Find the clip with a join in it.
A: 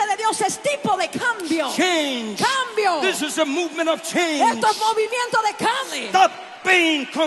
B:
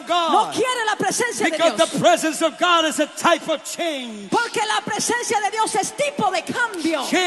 A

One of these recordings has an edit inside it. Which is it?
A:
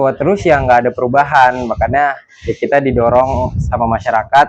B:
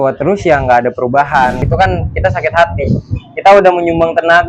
B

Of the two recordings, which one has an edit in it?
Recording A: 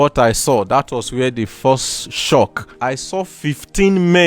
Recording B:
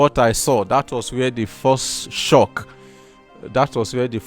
A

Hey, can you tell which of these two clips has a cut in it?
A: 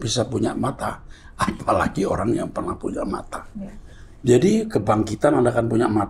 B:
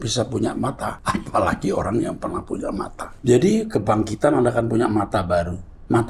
B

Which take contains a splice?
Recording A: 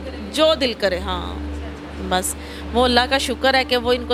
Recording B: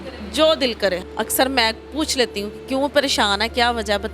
B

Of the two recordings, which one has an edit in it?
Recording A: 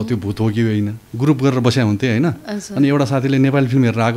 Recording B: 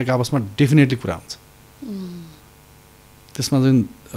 A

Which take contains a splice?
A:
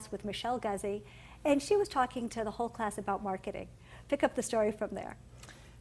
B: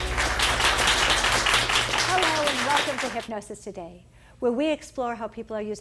A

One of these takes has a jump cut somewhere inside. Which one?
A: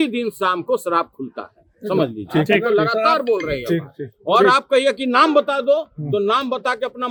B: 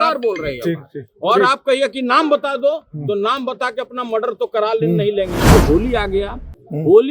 B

